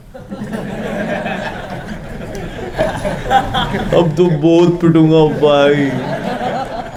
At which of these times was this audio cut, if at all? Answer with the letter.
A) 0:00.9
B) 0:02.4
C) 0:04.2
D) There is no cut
D